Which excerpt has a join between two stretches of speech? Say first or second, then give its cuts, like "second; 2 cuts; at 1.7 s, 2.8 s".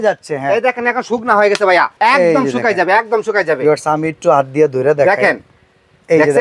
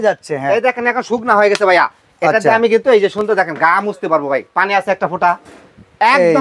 first; 1 cut; at 1.9 s